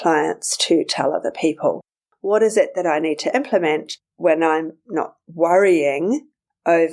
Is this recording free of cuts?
yes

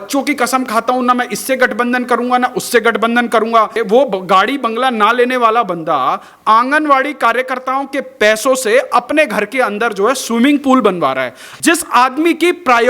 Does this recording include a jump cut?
yes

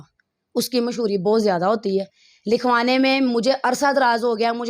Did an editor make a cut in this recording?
no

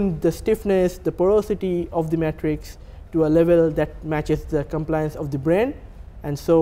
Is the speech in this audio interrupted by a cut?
no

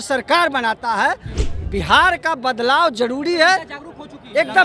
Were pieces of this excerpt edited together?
yes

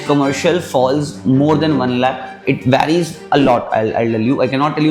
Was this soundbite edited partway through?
no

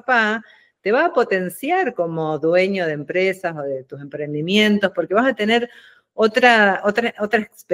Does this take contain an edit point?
no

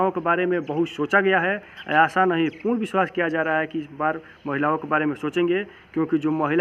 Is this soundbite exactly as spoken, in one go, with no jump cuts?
yes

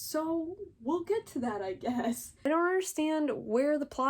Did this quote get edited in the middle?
yes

